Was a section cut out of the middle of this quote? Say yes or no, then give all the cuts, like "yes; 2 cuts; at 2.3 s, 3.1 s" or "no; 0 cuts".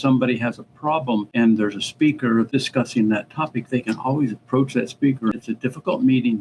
yes; 3 cuts; at 1.3 s, 2.5 s, 5.4 s